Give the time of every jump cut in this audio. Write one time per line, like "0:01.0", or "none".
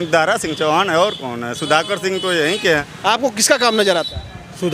0:02.8